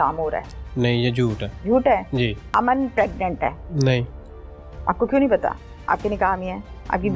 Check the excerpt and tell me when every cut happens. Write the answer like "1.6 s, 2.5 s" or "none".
1.5 s, 2.4 s, 3.6 s